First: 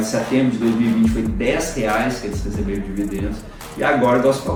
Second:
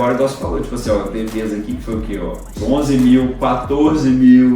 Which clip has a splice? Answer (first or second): second